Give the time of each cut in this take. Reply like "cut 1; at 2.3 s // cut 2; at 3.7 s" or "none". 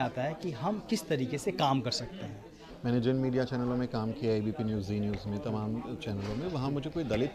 cut 1; at 2.7 s